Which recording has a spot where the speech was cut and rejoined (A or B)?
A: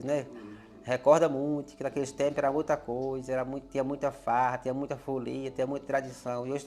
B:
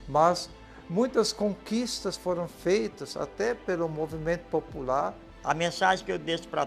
B